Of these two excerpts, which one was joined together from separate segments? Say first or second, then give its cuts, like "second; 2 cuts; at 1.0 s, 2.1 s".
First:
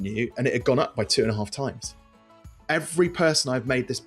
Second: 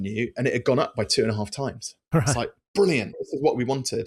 first; 1 cut; at 2.1 s